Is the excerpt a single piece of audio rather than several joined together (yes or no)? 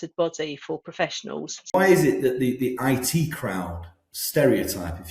no